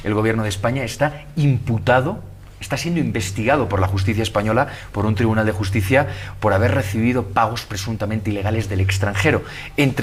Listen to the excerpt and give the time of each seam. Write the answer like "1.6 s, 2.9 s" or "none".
none